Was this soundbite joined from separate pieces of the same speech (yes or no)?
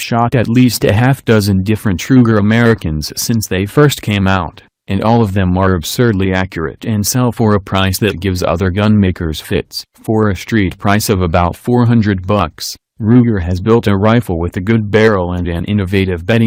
no